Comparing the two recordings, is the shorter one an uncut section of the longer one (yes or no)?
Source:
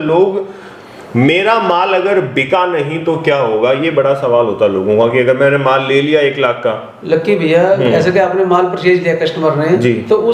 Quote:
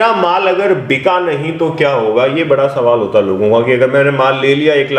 yes